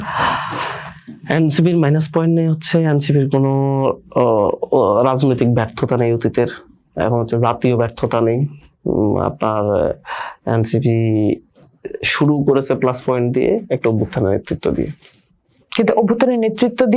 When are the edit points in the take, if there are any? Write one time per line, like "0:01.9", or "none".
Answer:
none